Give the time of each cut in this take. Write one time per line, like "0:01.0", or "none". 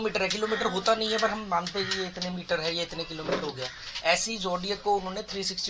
none